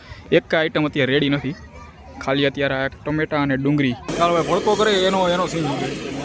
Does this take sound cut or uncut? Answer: cut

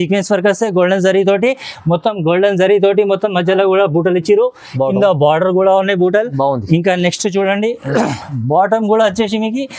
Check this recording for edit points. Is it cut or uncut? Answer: uncut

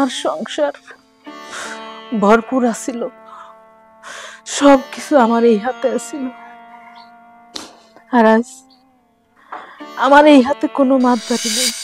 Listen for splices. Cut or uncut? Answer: uncut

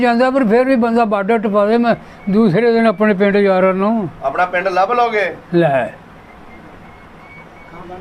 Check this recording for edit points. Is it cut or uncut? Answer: uncut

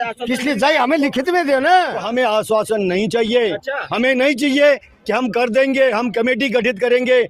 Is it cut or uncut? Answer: cut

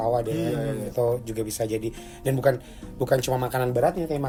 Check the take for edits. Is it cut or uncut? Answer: uncut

